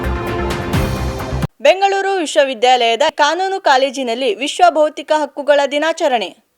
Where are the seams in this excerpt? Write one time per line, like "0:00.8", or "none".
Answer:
0:01.5